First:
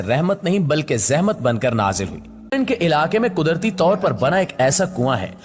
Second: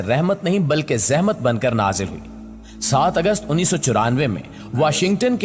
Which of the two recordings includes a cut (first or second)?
first